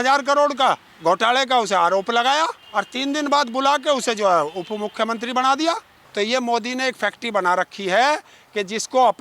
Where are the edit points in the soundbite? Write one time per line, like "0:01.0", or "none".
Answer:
0:00.9
0:02.6
0:06.0

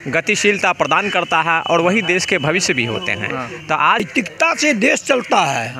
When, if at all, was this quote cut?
0:04.0

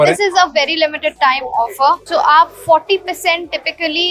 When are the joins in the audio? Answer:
none

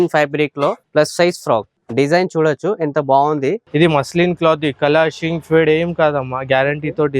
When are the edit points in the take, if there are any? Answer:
0:00.8
0:01.8
0:03.6

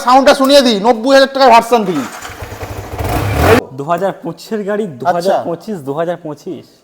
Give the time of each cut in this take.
0:03.6

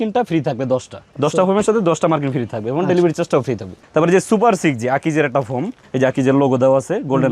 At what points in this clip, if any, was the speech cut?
none

